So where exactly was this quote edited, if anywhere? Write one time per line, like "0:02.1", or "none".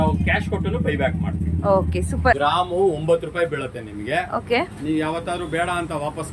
0:02.4